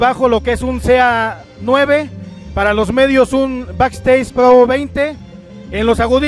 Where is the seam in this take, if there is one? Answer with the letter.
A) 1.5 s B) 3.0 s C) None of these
C